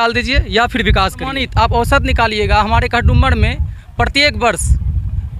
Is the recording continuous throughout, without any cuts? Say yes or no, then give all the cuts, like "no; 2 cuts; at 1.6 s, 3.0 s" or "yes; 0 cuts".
no; 1 cut; at 1.4 s